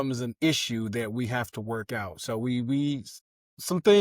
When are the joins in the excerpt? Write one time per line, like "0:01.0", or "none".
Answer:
none